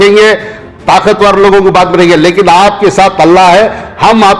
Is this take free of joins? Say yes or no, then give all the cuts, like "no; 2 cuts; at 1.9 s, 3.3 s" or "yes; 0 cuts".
yes; 0 cuts